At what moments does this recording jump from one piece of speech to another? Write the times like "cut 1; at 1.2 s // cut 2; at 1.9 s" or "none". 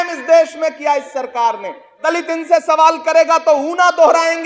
cut 1; at 2.0 s